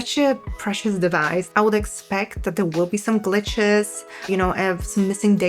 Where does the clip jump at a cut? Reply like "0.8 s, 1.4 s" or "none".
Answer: 1.5 s